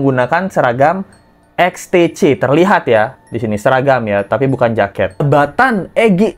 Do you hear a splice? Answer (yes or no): yes